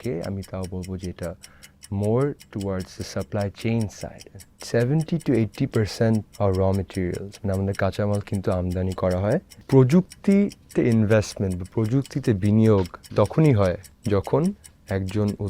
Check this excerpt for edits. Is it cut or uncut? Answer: cut